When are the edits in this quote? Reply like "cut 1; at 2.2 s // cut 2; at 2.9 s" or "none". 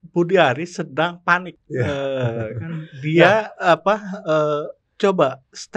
cut 1; at 1.6 s